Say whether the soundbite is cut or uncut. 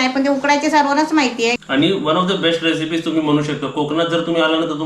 cut